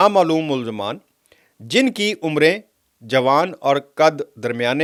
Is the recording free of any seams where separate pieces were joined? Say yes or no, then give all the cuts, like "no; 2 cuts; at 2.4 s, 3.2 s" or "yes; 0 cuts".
yes; 0 cuts